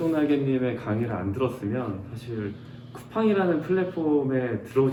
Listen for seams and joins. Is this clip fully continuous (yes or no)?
yes